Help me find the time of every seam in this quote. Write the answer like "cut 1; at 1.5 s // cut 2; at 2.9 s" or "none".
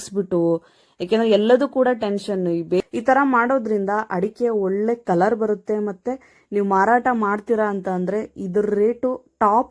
cut 1; at 2.8 s